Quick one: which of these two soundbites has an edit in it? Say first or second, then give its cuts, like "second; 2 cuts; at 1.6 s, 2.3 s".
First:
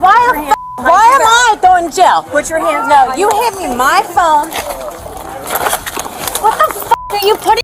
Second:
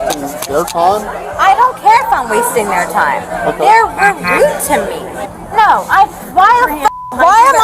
second; 1 cut; at 5.2 s